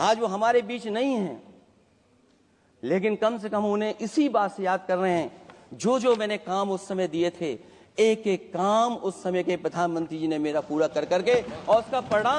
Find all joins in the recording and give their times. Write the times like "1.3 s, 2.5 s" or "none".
none